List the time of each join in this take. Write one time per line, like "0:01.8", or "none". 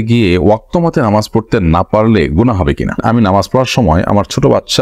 0:03.0